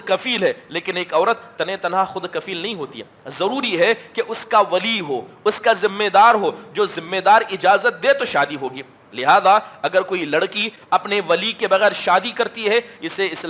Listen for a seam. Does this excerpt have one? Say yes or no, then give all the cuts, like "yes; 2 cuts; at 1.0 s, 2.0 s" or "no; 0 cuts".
yes; 1 cut; at 10.7 s